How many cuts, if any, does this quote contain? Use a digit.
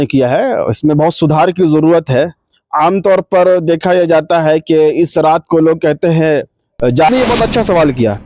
1